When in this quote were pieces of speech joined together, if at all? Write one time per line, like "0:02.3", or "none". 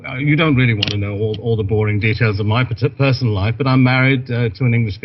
0:03.4